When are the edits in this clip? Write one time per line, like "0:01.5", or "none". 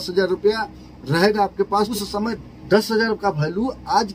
none